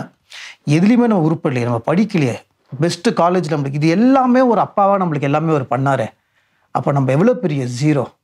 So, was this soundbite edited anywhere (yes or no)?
no